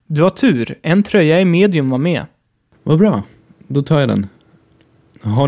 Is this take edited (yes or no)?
yes